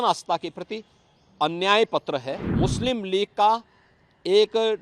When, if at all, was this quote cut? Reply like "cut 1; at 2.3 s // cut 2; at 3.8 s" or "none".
cut 1; at 2.4 s